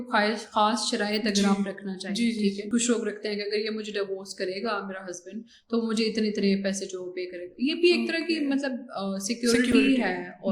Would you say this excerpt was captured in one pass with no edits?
no; 1 cut; at 2.6 s

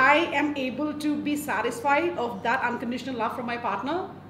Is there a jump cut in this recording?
no; 0 cuts

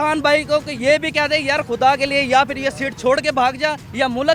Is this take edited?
no; 0 cuts

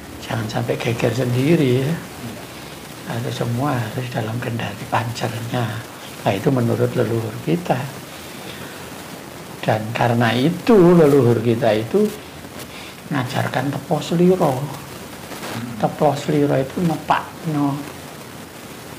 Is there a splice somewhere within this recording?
no; 0 cuts

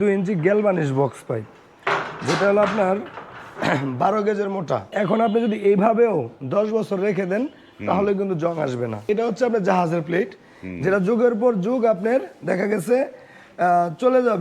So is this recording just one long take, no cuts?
no; 2 cuts; at 4.9 s, 9.0 s

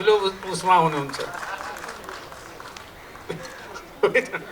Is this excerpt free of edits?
yes; 0 cuts

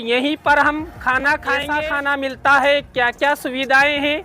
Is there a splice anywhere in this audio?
yes; 1 cut; at 1.7 s

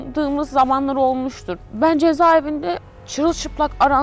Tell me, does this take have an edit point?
no; 0 cuts

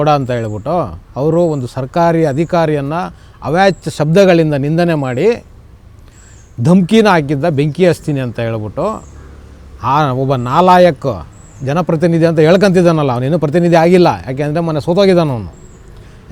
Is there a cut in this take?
no; 0 cuts

